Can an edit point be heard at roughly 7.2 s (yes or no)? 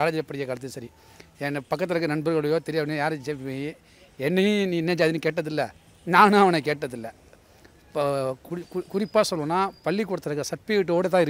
no